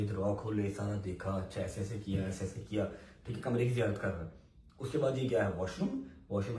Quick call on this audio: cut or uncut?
uncut